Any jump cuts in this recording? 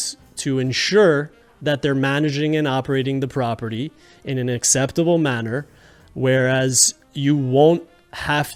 no; 0 cuts

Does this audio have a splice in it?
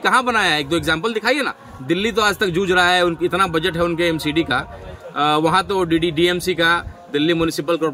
no; 0 cuts

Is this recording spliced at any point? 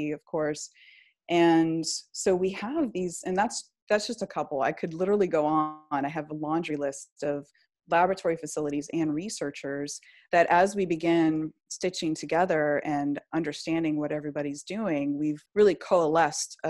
yes; 1 cut; at 15.4 s

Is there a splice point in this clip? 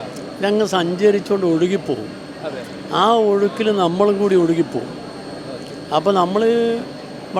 no; 0 cuts

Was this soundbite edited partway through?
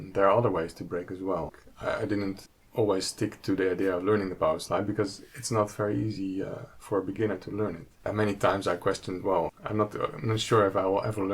yes; 4 cuts; at 1.6 s, 2.5 s, 8.1 s, 9.6 s

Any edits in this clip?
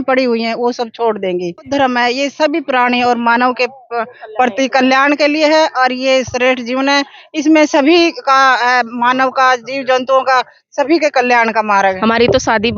yes; 2 cuts; at 1.7 s, 12.0 s

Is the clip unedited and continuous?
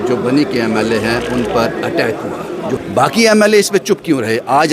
no; 1 cut; at 2.8 s

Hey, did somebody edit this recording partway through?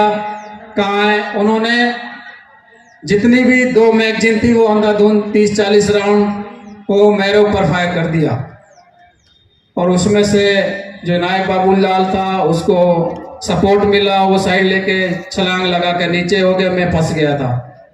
no; 0 cuts

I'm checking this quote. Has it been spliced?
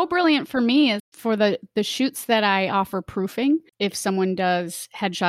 yes; 2 cuts; at 1.0 s, 3.7 s

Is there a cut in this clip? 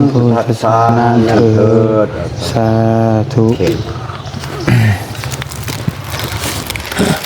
yes; 1 cut; at 1.0 s

